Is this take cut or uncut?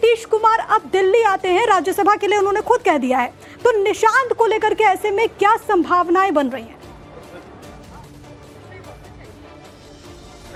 uncut